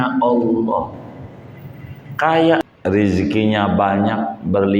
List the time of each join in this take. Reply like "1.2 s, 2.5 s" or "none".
2.6 s